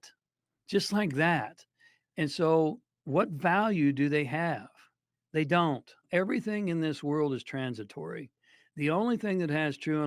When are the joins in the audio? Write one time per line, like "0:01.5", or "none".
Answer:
0:06.0